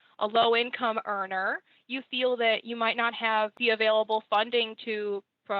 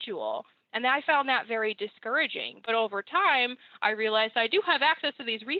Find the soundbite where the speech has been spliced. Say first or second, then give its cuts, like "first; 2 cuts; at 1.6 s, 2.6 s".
first; 1 cut; at 3.5 s